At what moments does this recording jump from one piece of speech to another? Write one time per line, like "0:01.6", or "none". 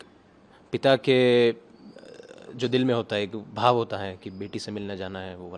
none